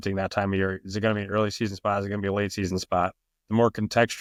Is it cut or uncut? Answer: uncut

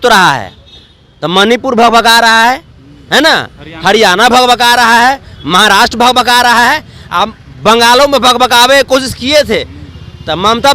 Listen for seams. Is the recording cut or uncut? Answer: uncut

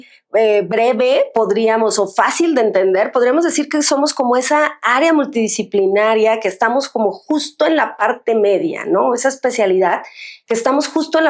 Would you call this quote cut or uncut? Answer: uncut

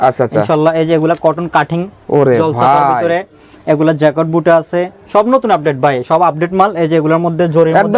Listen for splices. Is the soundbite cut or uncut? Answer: uncut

